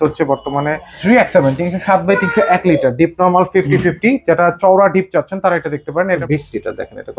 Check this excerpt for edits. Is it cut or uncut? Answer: cut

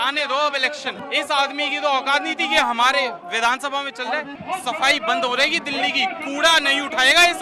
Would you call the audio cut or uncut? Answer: cut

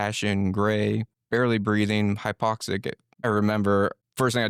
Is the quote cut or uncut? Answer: uncut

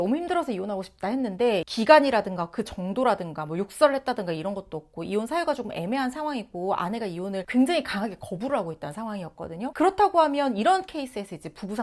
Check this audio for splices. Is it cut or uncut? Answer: cut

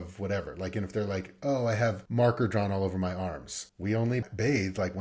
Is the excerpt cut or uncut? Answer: cut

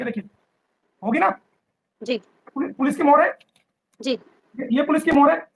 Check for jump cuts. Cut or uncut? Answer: uncut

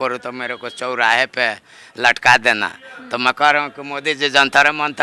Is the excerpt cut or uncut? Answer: uncut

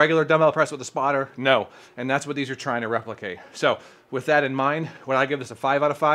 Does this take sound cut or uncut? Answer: uncut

